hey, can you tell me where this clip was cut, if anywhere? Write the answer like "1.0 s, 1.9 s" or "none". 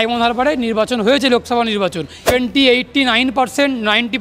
2.3 s